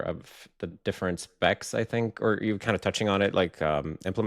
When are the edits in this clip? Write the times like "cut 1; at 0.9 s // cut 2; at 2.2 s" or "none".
none